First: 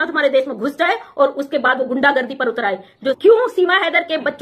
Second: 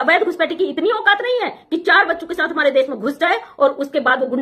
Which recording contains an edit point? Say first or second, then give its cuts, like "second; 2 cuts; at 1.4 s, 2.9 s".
first; 1 cut; at 3.2 s